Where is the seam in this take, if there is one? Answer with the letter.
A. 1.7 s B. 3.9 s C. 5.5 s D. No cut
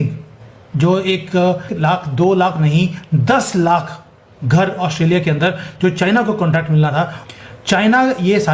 A